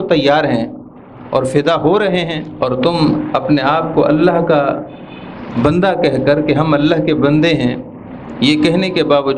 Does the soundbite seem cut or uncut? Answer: cut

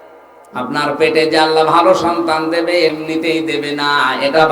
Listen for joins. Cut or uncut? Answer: cut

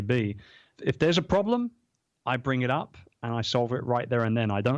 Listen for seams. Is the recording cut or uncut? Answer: uncut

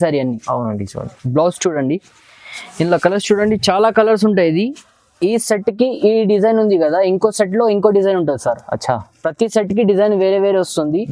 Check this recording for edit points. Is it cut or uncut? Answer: uncut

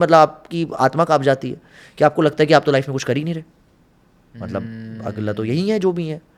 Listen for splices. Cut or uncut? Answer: uncut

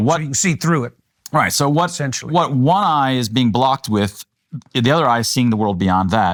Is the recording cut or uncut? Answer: uncut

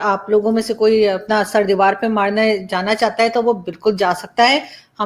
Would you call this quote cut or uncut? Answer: uncut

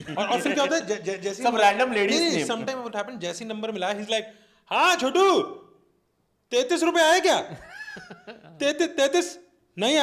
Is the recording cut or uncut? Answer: uncut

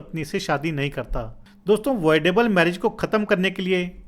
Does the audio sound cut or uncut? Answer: cut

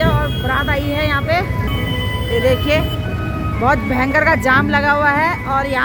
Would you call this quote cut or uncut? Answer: uncut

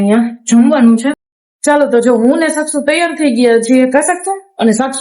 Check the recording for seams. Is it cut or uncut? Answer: cut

